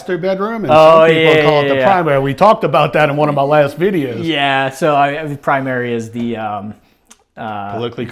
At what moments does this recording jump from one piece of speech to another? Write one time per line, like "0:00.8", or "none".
none